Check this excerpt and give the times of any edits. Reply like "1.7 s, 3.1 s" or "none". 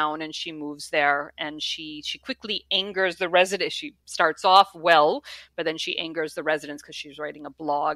none